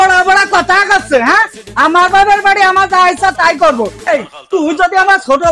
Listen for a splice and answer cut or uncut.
cut